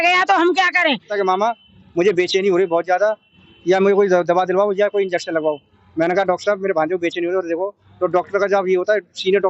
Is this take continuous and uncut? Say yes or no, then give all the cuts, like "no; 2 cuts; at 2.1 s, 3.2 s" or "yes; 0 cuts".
no; 1 cut; at 1.1 s